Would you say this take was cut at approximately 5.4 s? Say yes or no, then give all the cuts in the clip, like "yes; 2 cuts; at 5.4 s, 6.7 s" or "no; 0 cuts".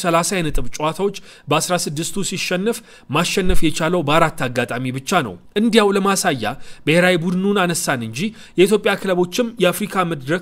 no; 0 cuts